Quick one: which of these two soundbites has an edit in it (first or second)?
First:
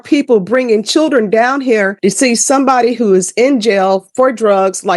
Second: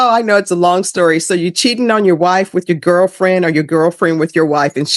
first